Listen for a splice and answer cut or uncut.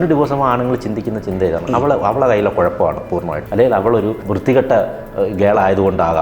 cut